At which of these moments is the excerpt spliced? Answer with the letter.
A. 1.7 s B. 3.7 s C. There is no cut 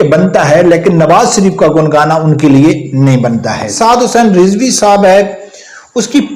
B